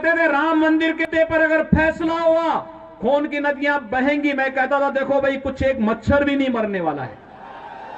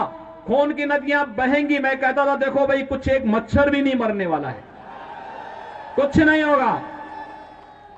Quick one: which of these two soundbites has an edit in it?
first; 1 cut; at 1.0 s

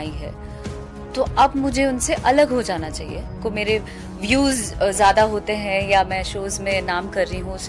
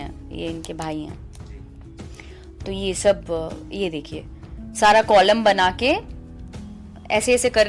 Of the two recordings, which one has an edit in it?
first; 1 cut; at 3.4 s

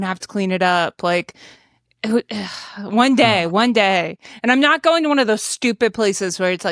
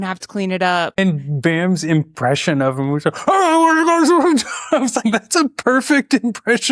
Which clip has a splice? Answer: second; 1 cut; at 1.0 s

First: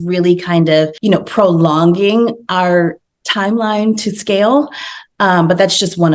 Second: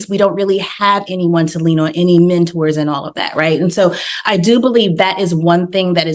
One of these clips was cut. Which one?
first; 1 cut; at 0.9 s

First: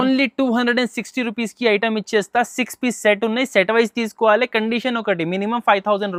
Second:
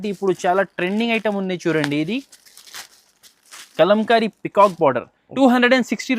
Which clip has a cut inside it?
second; 1 cut; at 5.3 s

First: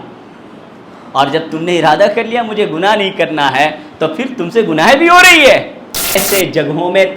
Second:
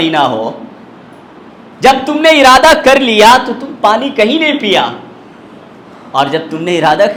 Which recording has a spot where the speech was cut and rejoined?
first; 1 cut; at 6.2 s

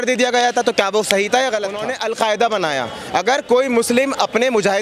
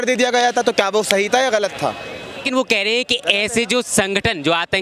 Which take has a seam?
first; 1 cut; at 1.9 s

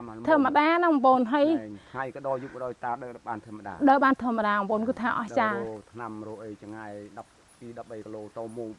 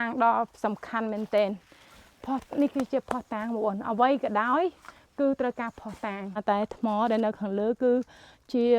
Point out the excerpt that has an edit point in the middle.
second; 1 cut; at 6.4 s

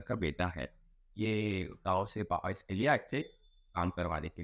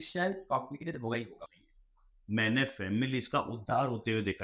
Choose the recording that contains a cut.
second; 1 cut; at 1.4 s

